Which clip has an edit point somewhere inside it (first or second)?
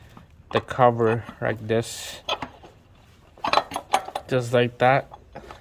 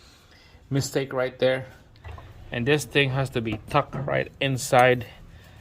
second